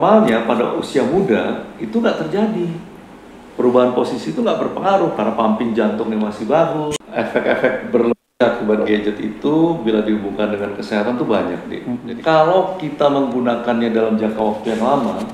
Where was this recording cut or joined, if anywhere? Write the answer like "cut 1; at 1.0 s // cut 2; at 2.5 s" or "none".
cut 1; at 6.9 s // cut 2; at 12.0 s